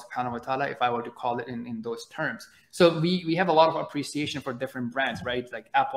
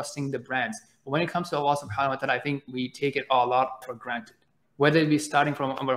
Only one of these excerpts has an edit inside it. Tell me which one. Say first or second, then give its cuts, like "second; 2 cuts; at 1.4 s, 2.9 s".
second; 2 cuts; at 2.7 s, 3.8 s